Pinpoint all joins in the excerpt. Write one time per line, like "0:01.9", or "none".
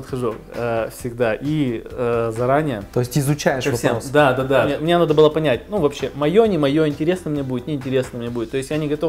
0:02.8
0:04.8